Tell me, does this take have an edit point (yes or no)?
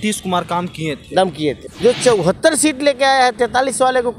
yes